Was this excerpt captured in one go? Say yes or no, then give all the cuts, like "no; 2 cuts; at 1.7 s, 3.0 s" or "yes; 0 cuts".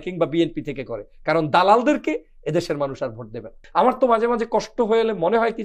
no; 1 cut; at 3.6 s